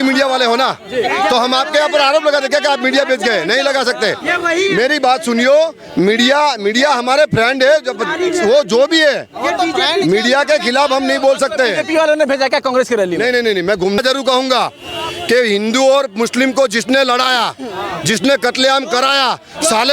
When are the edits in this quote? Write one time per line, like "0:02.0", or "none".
0:14.0